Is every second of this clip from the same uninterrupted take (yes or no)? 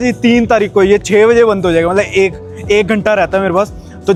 yes